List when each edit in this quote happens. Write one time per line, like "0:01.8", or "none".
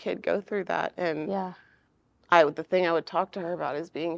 none